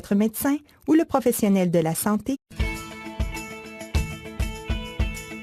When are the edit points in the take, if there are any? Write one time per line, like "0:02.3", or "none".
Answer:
none